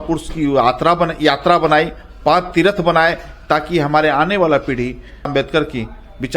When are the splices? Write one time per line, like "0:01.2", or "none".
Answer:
0:05.3